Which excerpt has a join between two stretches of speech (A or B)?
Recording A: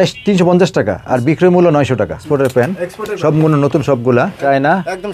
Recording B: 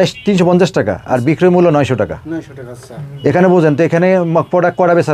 A